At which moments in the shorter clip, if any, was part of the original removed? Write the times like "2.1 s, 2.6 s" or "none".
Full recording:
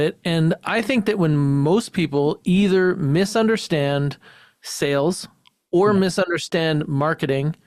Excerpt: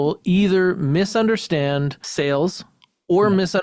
2.0 s